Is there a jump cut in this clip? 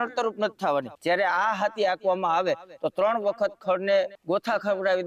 yes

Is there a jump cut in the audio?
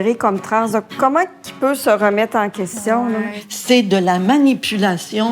yes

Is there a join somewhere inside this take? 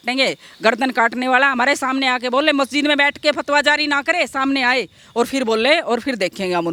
no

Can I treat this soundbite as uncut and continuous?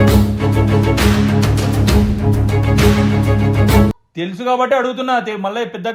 yes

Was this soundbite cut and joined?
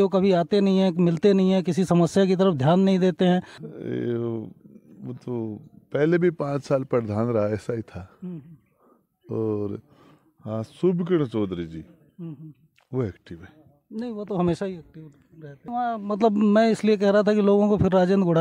yes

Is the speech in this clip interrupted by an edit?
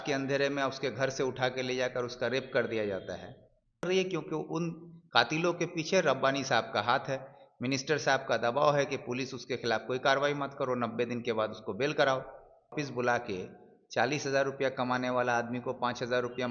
yes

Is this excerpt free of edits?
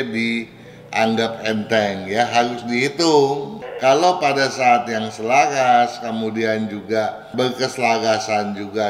no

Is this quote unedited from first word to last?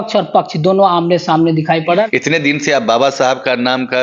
no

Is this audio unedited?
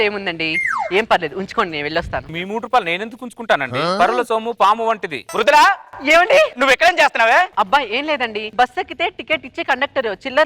no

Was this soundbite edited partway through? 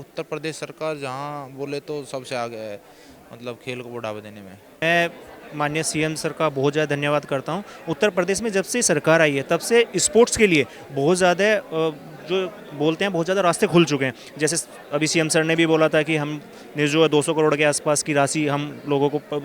yes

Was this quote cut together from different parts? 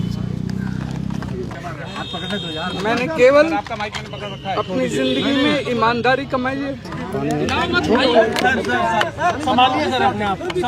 yes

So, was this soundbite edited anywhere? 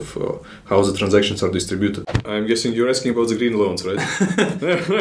yes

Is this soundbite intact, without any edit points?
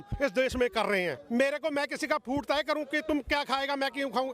no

